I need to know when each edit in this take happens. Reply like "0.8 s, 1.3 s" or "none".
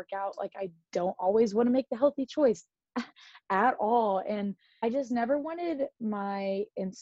4.7 s